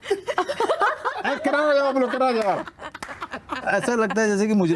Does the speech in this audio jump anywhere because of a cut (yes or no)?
no